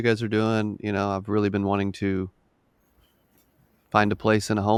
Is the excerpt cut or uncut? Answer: uncut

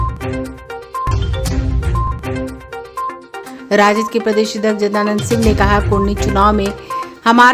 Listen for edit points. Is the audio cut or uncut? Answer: uncut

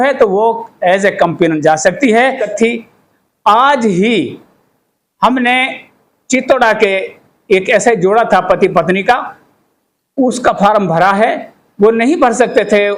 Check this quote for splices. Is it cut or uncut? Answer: cut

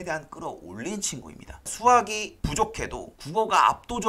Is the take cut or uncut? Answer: cut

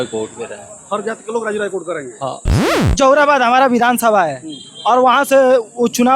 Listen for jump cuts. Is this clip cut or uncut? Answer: cut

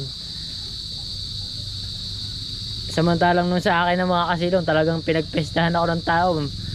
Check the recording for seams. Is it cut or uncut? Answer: uncut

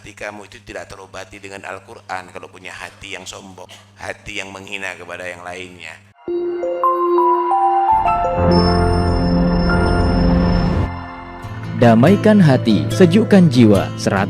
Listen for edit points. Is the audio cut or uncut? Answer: cut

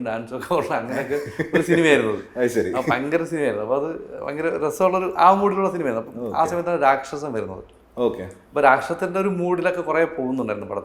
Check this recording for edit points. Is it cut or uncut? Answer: uncut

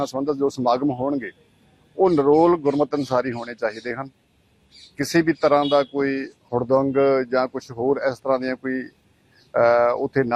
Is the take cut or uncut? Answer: uncut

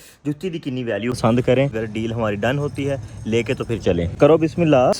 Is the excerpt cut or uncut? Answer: cut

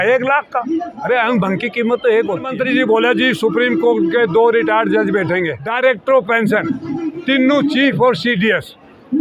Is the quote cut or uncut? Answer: cut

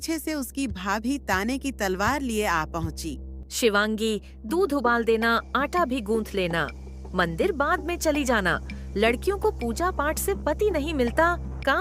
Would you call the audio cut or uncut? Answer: uncut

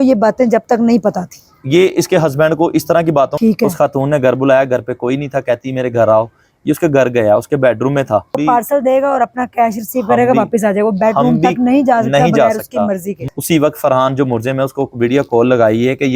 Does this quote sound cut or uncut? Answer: cut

